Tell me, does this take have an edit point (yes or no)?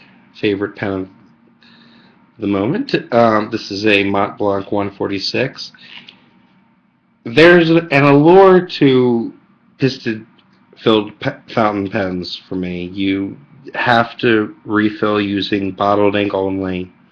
no